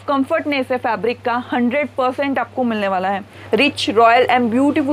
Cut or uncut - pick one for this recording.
cut